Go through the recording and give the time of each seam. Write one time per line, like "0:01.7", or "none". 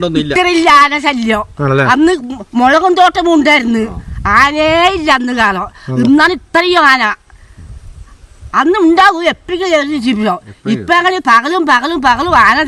none